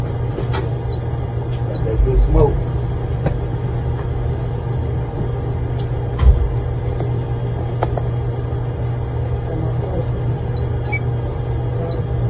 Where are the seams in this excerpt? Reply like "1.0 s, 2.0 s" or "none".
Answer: none